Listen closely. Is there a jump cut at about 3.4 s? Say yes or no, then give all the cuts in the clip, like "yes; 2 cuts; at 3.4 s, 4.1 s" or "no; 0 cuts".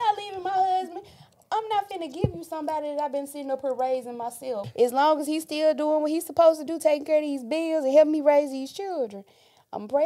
no; 1 cut; at 4.7 s